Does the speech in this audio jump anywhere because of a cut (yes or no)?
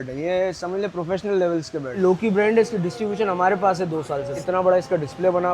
yes